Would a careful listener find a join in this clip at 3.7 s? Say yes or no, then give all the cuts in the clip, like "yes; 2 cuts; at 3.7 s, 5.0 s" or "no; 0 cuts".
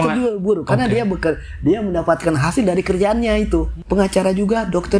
yes; 1 cut; at 3.7 s